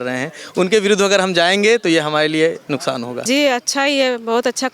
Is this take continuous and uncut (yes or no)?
no